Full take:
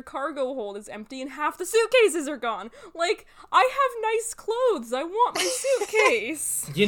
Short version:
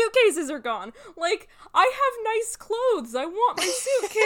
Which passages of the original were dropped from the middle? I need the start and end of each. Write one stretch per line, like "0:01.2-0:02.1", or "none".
none